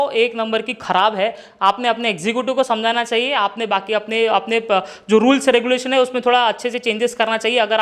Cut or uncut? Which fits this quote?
uncut